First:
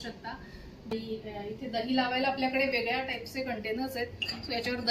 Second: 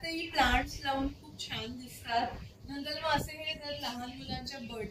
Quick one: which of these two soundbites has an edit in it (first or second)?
first